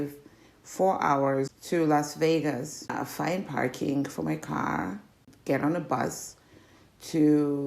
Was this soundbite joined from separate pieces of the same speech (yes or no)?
yes